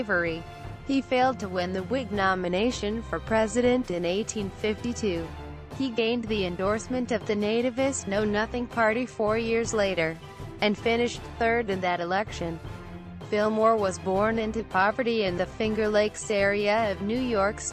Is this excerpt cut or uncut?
uncut